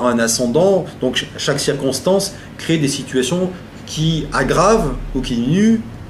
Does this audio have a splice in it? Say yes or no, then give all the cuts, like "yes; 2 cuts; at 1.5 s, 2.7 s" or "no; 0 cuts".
yes; 1 cut; at 5.0 s